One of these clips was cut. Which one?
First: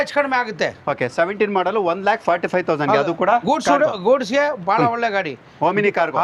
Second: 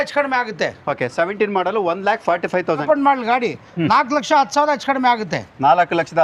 second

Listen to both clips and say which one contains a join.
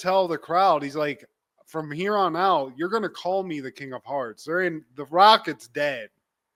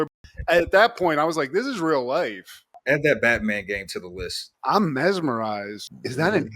second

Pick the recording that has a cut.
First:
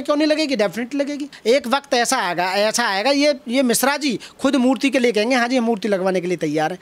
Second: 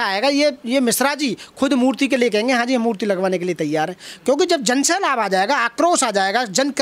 first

